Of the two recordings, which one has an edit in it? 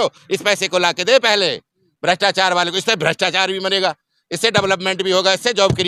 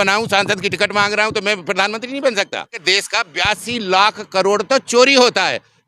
second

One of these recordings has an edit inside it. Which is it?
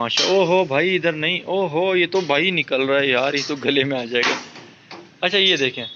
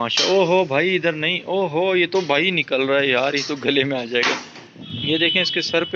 second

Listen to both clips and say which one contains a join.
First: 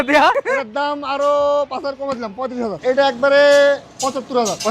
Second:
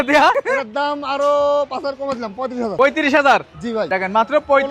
first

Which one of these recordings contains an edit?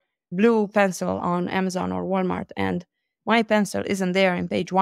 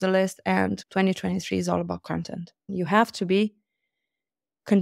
second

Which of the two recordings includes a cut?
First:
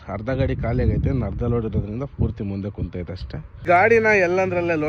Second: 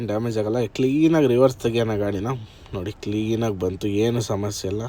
first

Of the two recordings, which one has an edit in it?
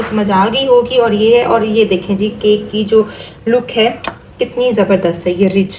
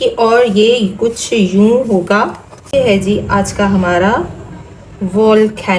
second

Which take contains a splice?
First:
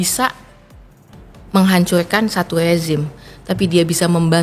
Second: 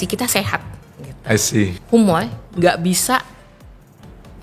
second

